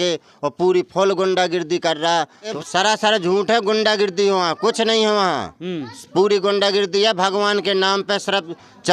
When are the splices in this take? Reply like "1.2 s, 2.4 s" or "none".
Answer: 2.6 s